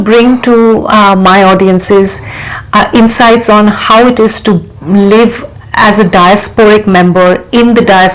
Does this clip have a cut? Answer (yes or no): no